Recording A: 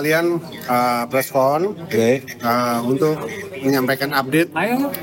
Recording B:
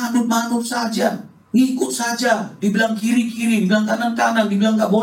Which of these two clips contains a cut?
B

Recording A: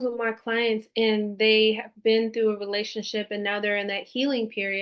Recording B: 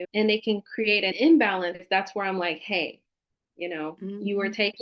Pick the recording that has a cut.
B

